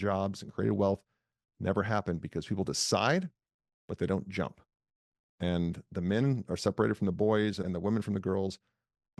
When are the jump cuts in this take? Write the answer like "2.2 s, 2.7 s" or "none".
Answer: 7.6 s